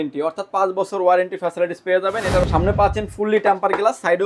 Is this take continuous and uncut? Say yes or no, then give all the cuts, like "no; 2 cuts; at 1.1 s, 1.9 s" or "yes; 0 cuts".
no; 1 cut; at 2.4 s